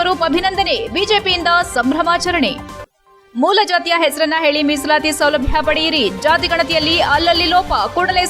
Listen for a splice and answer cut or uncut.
uncut